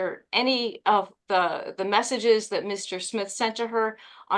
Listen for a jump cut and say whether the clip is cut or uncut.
uncut